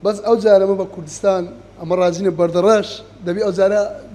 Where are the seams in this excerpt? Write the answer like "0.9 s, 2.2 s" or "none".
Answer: none